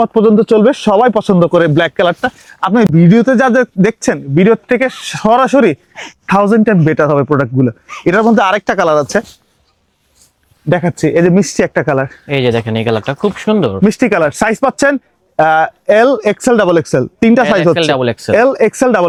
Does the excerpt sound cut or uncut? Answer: uncut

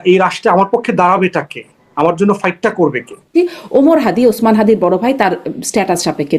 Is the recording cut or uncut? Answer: cut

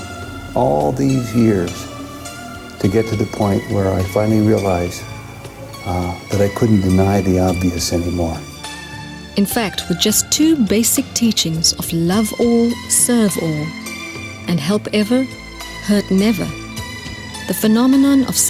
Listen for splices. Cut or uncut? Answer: uncut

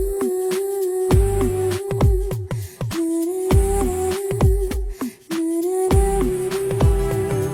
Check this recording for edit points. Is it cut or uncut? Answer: uncut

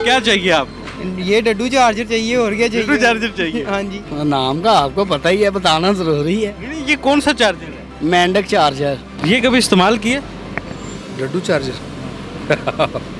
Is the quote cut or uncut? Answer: cut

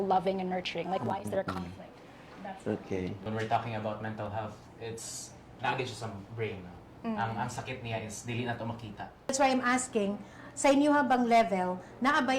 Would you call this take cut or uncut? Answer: cut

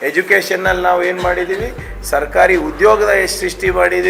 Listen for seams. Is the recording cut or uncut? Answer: uncut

